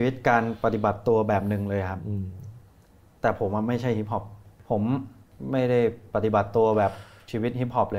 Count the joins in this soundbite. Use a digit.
2